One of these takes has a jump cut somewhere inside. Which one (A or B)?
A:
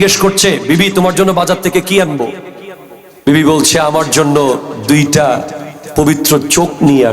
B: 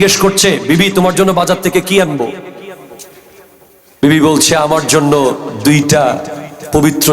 A